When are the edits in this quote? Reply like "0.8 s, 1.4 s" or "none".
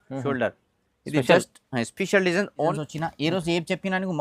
2.7 s

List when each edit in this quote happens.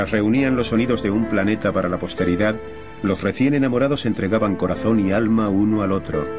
none

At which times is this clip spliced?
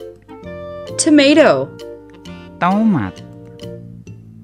1.0 s, 2.4 s, 3.7 s

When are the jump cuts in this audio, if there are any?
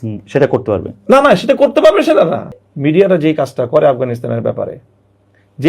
2.6 s

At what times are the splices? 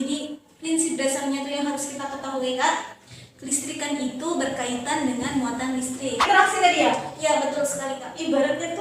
6.2 s

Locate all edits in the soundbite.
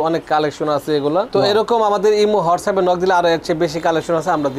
1.3 s

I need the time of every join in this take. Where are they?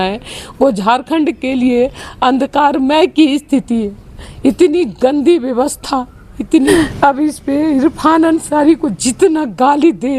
6.7 s

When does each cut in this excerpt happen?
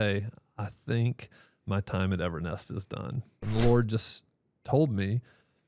3.3 s

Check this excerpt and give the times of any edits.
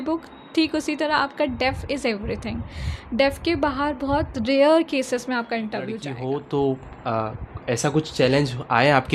6.1 s

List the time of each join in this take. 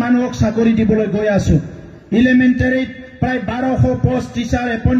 none

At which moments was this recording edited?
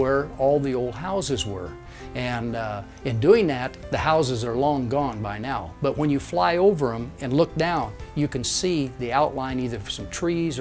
none

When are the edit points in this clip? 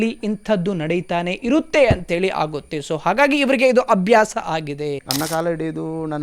5.0 s

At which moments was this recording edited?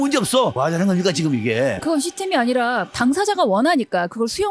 1.8 s

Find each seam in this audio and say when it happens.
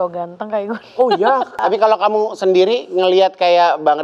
1.6 s

